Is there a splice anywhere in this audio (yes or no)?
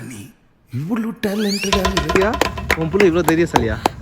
yes